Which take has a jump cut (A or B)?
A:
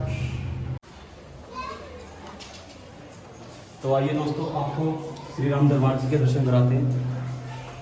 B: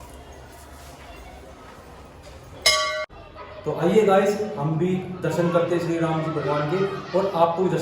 B